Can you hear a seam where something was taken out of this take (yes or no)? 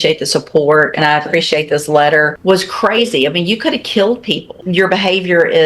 yes